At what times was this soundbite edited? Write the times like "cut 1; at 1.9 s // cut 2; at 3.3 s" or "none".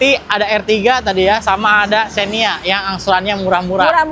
none

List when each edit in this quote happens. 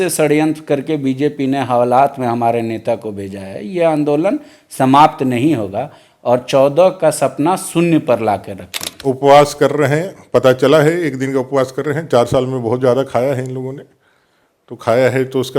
cut 1; at 8.9 s

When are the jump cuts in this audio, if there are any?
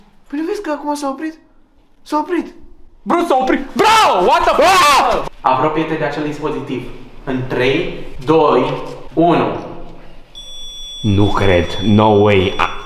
cut 1; at 5.2 s // cut 2; at 8.1 s // cut 3; at 9.0 s

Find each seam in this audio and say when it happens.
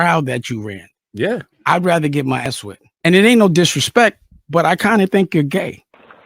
cut 1; at 2.5 s

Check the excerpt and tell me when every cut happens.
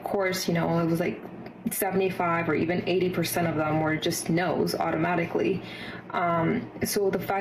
cut 1; at 6.4 s

